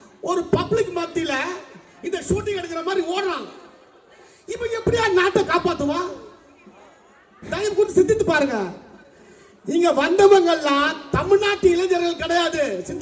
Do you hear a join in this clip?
no; 0 cuts

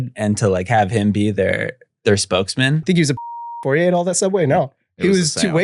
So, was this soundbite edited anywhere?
yes; 1 cut; at 2.8 s

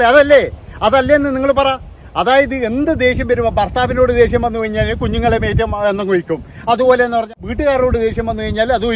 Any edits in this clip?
yes; 1 cut; at 7.3 s

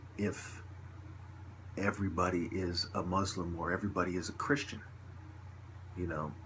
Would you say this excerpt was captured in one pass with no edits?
yes; 0 cuts

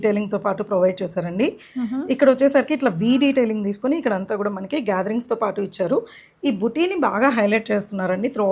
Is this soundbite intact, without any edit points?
yes; 0 cuts

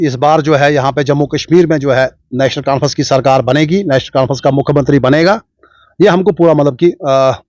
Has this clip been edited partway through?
no; 0 cuts

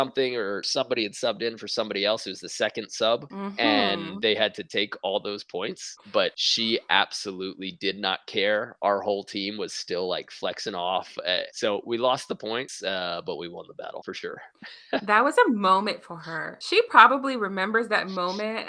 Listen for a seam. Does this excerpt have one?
no; 0 cuts

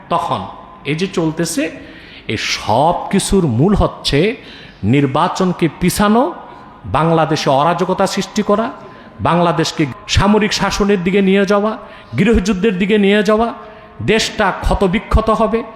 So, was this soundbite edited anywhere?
yes; 1 cut; at 9.9 s

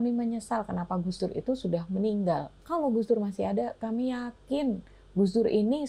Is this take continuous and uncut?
no; 1 cut; at 2.6 s

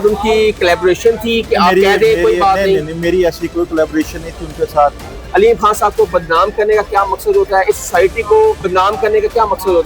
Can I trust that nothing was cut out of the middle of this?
no; 2 cuts; at 5.1 s, 8.6 s

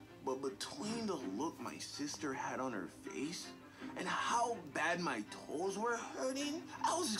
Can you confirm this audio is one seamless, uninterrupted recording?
no; 1 cut; at 1.7 s

